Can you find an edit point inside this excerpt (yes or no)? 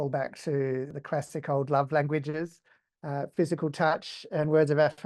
yes